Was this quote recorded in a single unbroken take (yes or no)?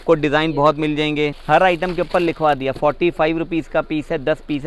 no